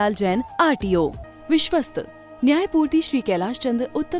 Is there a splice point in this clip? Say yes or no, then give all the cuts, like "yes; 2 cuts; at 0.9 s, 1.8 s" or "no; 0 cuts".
yes; 1 cut; at 1.2 s